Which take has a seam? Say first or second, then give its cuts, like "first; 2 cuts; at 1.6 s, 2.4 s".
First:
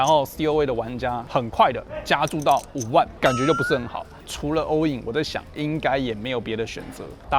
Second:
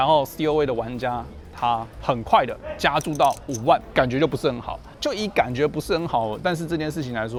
first; 2 cuts; at 1.2 s, 4.1 s